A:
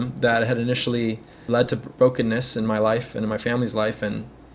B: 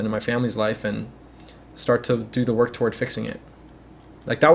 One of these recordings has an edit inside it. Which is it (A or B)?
A